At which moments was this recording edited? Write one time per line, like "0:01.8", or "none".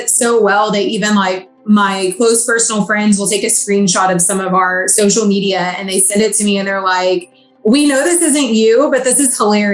none